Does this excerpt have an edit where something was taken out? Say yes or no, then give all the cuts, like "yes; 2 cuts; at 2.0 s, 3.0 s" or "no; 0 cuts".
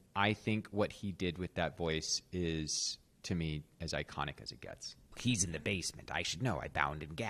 yes; 1 cut; at 5.1 s